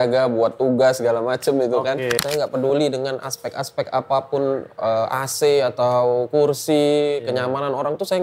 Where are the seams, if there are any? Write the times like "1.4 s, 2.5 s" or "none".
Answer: 2.2 s